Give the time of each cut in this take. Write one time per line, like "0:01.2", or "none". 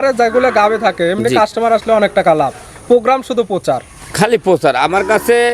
none